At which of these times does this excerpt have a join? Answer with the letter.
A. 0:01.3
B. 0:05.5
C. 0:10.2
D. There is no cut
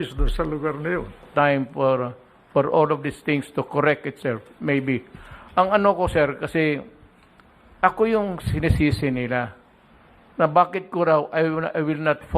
A